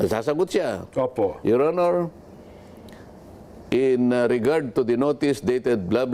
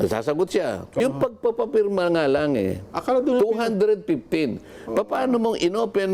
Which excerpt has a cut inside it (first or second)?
second